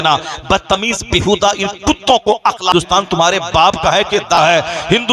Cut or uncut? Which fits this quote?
cut